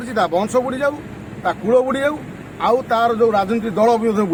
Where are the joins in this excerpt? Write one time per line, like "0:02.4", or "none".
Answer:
none